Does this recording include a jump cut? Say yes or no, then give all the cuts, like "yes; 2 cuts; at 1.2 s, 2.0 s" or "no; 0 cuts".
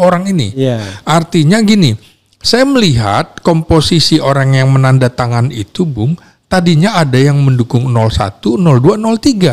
no; 0 cuts